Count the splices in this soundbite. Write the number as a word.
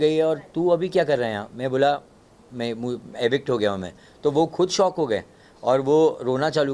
zero